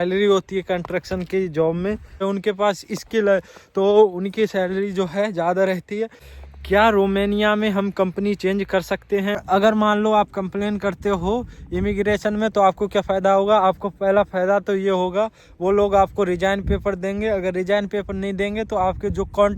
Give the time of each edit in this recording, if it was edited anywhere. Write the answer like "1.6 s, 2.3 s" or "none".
2.2 s, 6.2 s, 9.4 s